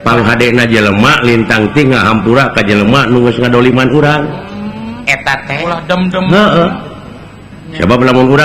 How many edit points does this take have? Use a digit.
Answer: 0